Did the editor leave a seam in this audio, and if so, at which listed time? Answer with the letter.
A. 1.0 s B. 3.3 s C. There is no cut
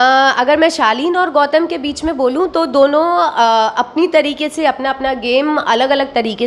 C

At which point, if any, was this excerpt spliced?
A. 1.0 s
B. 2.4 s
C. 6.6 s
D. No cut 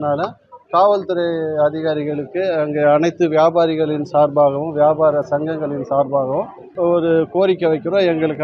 C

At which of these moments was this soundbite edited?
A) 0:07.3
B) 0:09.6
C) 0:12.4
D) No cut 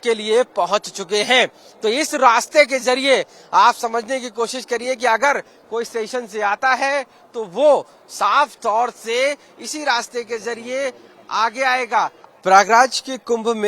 C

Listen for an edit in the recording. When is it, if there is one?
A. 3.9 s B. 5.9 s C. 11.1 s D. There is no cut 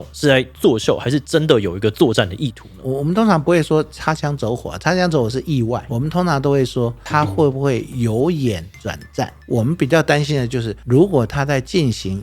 B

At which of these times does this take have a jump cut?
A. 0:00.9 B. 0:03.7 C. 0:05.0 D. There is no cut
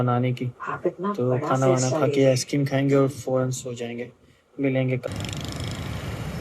C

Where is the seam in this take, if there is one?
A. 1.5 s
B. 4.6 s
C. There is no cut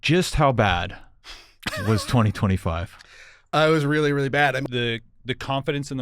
B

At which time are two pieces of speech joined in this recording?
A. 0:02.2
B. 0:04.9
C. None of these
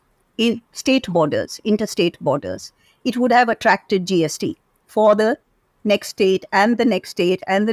C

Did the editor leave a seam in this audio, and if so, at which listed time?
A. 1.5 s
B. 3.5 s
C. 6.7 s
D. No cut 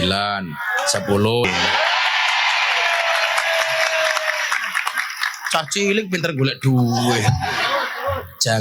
A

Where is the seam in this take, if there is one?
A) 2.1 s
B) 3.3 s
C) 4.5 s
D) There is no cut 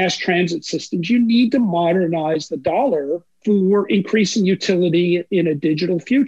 B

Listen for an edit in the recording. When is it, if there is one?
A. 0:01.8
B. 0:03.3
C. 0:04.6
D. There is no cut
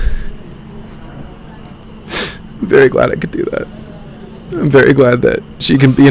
D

